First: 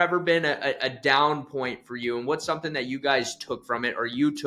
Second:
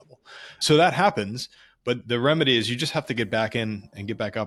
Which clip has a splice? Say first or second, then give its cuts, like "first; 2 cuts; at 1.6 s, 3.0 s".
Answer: second; 1 cut; at 2.0 s